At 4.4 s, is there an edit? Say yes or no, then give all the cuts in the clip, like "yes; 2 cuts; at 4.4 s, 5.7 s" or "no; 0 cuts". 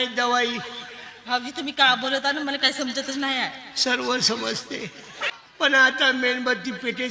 no; 1 cut; at 5.7 s